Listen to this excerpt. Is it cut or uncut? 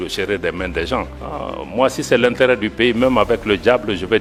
uncut